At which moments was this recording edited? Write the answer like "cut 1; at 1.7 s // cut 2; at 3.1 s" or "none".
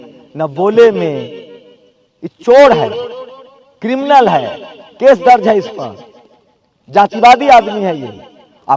none